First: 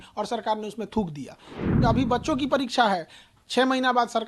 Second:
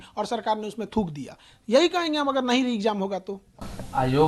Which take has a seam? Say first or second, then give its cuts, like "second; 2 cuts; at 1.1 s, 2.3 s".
first; 1 cut; at 1.6 s